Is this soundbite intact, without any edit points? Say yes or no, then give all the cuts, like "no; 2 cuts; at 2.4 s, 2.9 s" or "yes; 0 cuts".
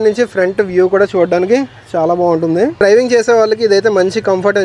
yes; 0 cuts